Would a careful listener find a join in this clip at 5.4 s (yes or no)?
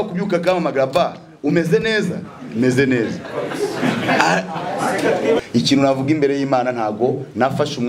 yes